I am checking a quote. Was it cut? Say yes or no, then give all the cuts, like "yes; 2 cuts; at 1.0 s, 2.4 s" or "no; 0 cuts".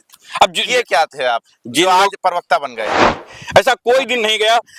yes; 1 cut; at 3.0 s